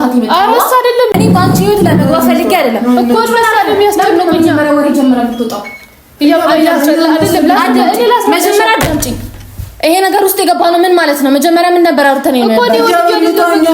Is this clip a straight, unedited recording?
no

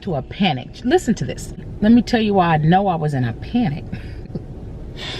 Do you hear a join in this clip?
yes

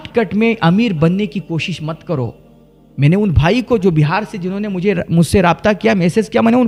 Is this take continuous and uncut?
yes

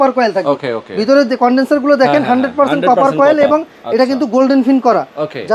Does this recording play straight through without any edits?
yes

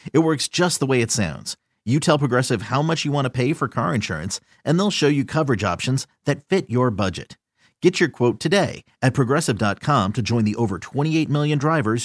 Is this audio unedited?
yes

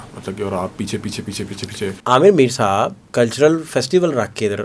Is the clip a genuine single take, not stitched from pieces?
no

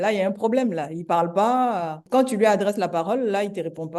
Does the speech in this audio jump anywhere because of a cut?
yes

